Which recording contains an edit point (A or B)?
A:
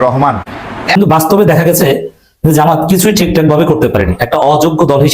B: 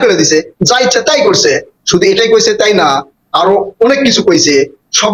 A